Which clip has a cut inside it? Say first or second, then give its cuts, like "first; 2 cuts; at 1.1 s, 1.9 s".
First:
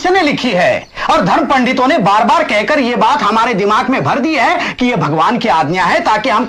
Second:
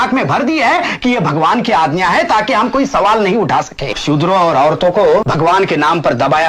second; 2 cuts; at 4.0 s, 5.3 s